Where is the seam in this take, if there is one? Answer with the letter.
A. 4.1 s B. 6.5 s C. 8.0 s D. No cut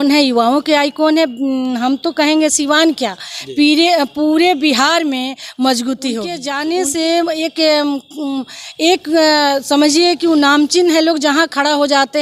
B